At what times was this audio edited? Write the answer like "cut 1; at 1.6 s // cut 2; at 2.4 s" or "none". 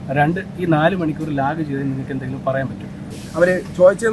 cut 1; at 3.1 s